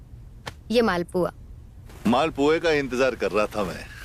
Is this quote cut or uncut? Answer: uncut